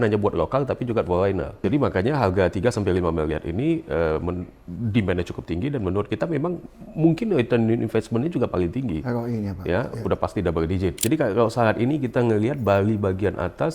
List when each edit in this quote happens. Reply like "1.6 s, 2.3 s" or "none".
1.6 s, 11.0 s